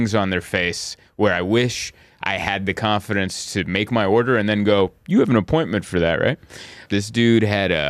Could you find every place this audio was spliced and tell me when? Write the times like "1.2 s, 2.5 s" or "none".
6.9 s